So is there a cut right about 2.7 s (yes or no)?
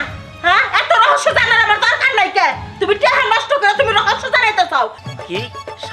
no